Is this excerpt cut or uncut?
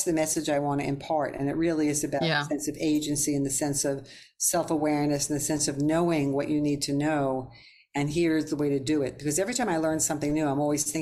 uncut